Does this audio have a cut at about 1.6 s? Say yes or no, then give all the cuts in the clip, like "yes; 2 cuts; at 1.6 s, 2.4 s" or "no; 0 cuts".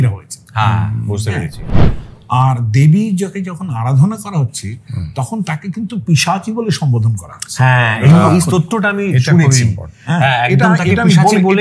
yes; 1 cut; at 1.6 s